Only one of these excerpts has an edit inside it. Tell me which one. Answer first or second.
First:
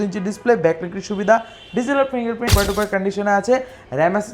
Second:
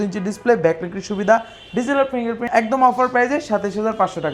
first